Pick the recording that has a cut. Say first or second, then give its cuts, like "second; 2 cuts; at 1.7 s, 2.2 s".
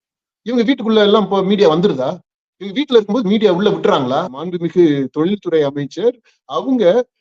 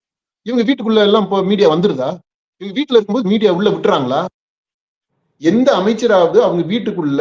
first; 1 cut; at 4.5 s